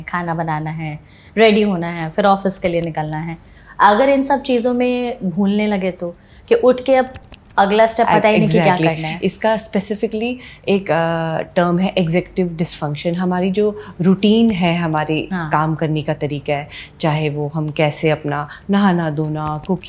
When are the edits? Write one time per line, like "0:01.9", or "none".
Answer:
none